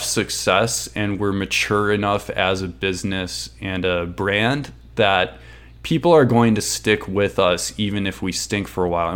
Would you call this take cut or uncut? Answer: uncut